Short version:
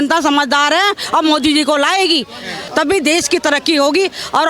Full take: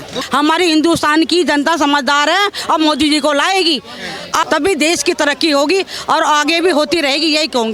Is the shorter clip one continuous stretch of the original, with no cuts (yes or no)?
no